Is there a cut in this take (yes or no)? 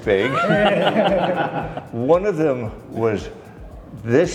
no